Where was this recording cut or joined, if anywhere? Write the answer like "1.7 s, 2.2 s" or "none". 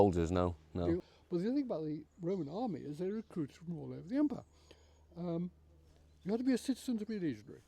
1.0 s